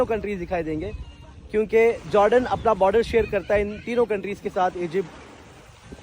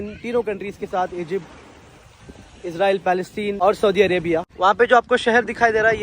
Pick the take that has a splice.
second; 1 cut; at 4.5 s

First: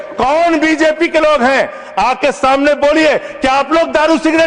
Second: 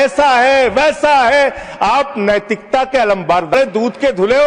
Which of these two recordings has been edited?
second; 1 cut; at 3.5 s

